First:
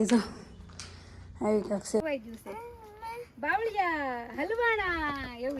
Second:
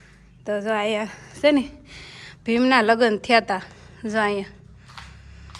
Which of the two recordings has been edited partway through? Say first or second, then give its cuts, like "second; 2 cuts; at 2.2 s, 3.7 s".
first; 1 cut; at 2.0 s